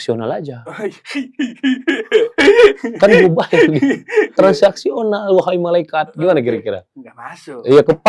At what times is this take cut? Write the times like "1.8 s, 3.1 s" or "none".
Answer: 4.3 s